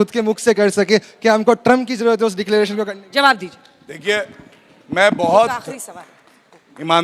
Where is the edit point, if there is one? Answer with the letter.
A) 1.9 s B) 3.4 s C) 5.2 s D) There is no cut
D